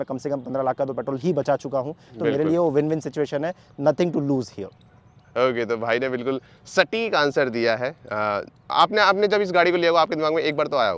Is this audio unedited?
yes; 0 cuts

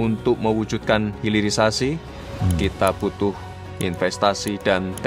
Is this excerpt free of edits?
yes; 0 cuts

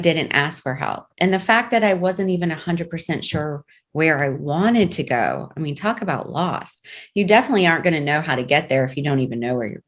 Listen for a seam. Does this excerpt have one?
no; 0 cuts

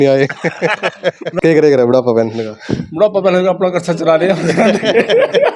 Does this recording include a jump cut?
yes; 1 cut; at 1.3 s

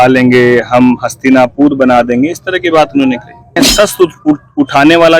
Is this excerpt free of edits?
no; 1 cut; at 3.6 s

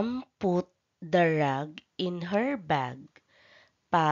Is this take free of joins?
no; 1 cut; at 2.6 s

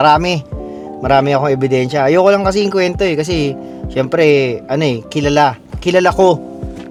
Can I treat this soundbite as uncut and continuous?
yes; 0 cuts

